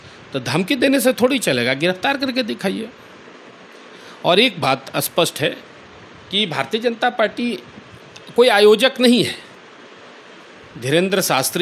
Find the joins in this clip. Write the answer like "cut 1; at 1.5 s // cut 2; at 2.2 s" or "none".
none

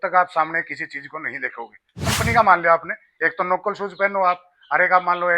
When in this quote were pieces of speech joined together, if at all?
cut 1; at 2.1 s

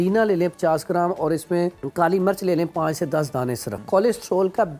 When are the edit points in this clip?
cut 1; at 1.8 s // cut 2; at 3.7 s

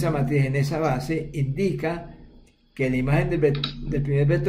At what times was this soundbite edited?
none

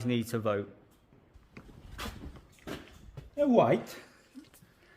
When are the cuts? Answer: cut 1; at 1.4 s

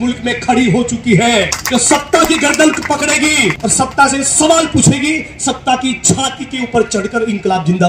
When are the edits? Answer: cut 1; at 1.6 s // cut 2; at 3.6 s

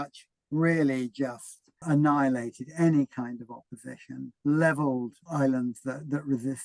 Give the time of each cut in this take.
cut 1; at 1.8 s // cut 2; at 4.3 s

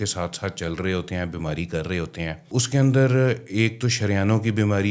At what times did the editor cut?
cut 1; at 2.5 s

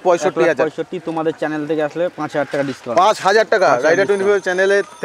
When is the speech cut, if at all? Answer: none

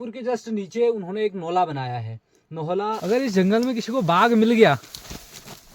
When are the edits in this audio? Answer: cut 1; at 3.0 s

